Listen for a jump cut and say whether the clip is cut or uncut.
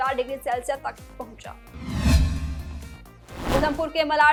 uncut